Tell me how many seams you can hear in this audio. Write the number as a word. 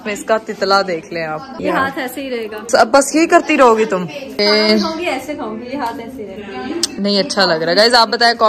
zero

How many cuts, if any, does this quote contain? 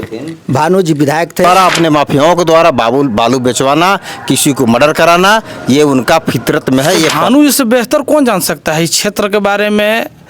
two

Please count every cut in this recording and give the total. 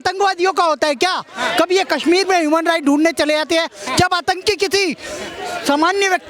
zero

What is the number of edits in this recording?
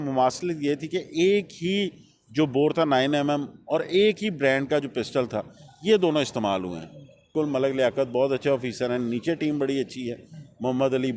one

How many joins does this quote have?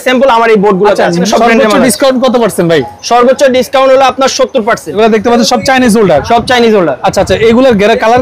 two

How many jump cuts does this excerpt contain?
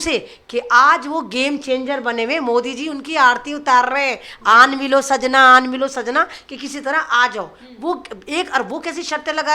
zero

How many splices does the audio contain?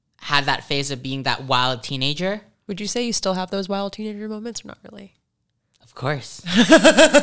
one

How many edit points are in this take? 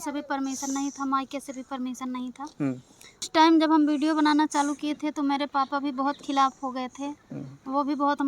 one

